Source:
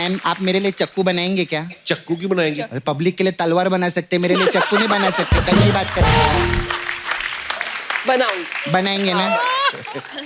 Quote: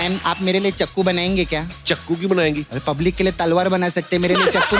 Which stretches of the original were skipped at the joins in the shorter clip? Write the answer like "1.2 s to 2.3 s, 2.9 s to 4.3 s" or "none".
none